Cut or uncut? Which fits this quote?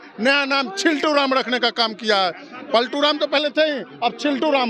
uncut